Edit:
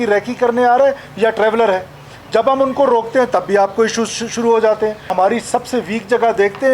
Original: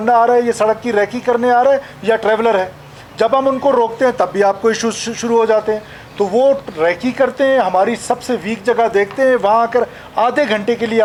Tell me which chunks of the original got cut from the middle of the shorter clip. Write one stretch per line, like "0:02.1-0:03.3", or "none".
0:06.0-0:07.7